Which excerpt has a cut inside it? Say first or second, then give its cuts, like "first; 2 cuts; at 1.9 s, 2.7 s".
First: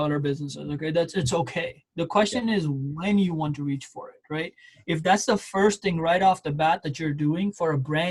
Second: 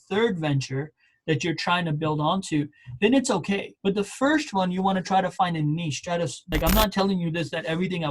second; 1 cut; at 6.4 s